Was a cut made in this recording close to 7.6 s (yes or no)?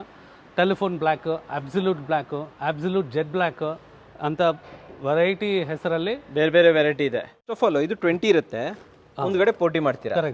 yes